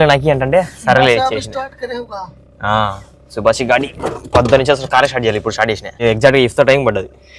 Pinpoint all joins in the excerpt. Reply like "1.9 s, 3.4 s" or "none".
6.0 s